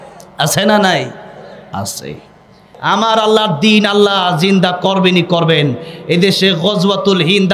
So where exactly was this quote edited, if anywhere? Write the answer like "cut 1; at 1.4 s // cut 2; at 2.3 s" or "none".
cut 1; at 2.7 s